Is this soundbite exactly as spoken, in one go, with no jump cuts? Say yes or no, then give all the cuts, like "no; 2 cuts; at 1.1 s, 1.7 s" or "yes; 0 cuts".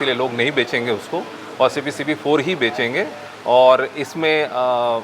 yes; 0 cuts